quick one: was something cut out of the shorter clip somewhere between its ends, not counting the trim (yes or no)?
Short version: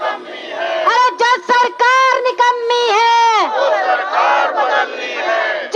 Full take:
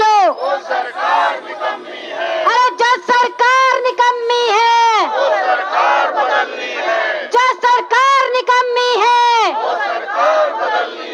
no